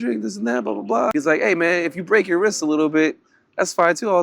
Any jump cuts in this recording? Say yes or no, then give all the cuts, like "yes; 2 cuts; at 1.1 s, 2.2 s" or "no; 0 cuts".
yes; 1 cut; at 1.1 s